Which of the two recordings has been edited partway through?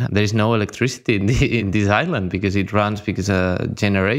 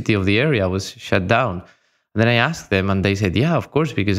first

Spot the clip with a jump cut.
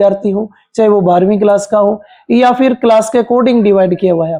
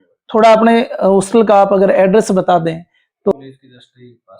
second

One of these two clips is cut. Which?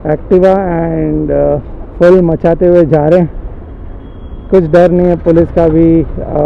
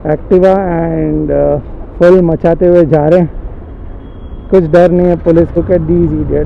second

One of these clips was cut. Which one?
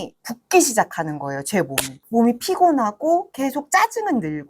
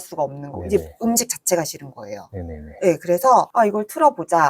first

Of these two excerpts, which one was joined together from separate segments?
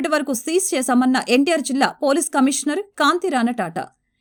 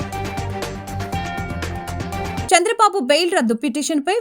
second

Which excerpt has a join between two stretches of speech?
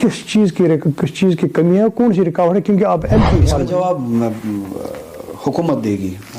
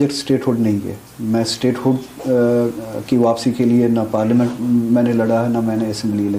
first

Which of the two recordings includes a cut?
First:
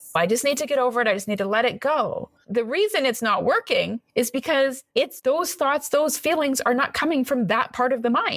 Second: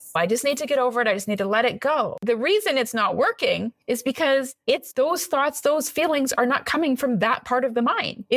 second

